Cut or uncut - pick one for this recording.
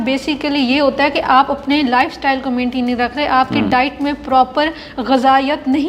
uncut